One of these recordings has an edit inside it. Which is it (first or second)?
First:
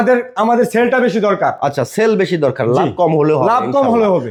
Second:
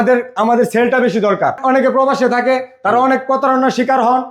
second